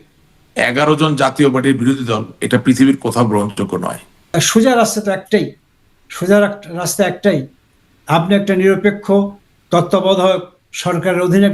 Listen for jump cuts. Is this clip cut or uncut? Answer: cut